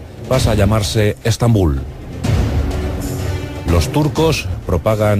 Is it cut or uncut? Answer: cut